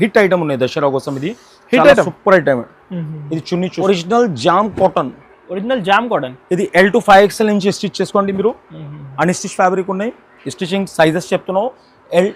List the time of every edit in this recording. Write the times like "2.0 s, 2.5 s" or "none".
3.7 s